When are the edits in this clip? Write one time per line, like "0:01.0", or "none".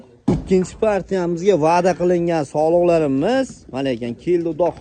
none